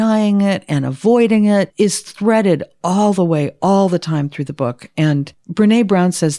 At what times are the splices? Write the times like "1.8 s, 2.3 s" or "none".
1.7 s, 5.4 s